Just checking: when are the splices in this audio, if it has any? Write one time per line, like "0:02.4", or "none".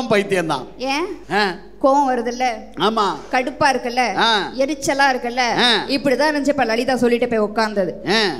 0:01.2